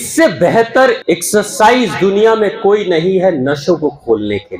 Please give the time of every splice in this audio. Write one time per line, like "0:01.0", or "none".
0:01.0